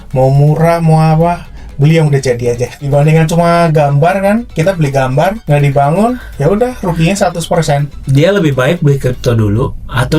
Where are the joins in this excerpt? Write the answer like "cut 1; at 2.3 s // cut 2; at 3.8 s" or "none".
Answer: cut 1; at 2.8 s // cut 2; at 5.4 s // cut 3; at 7.9 s